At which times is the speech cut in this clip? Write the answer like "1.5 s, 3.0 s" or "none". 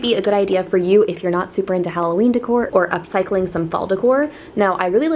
none